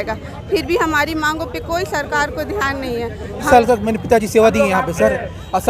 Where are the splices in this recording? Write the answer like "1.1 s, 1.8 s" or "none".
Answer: 3.4 s